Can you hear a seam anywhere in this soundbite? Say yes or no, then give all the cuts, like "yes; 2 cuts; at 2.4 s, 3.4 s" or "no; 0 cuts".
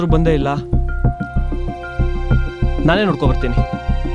no; 0 cuts